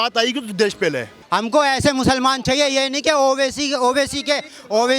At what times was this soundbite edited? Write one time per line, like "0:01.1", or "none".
0:01.1